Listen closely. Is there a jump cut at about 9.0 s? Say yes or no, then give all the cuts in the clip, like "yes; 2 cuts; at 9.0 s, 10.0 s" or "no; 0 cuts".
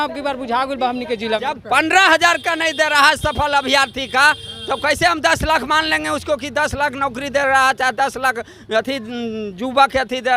no; 1 cut; at 1.6 s